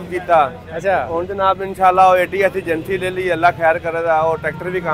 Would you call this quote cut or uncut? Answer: uncut